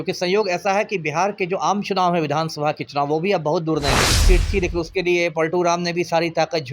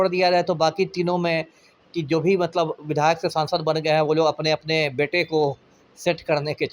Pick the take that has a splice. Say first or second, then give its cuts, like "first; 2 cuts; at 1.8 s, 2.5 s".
first; 1 cut; at 4.2 s